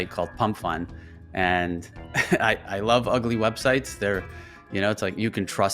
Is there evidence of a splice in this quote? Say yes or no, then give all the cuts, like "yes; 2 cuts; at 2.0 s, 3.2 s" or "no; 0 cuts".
no; 0 cuts